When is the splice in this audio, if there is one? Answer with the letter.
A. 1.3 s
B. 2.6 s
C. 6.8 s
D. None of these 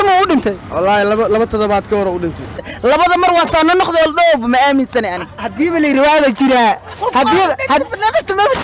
B